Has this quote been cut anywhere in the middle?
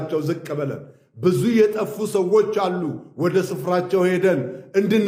no; 0 cuts

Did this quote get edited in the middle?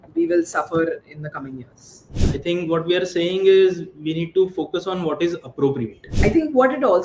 yes; 2 cuts; at 2.1 s, 6.0 s

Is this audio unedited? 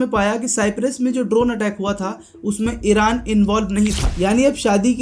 no; 1 cut; at 4.0 s

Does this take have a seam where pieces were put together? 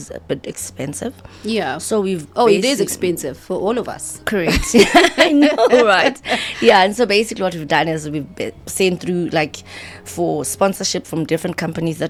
no; 0 cuts

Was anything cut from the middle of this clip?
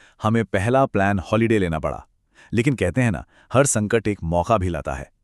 no; 0 cuts

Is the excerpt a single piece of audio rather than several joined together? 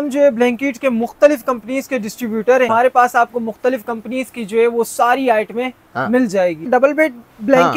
no; 2 cuts; at 2.7 s, 6.6 s

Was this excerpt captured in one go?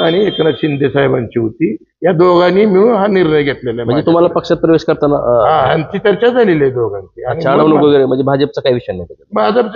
yes; 0 cuts

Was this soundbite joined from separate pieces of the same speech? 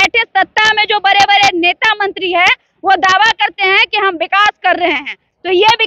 no; 0 cuts

